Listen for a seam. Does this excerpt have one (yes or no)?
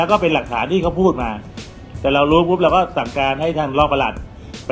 no